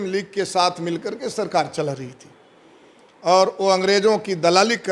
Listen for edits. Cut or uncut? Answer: uncut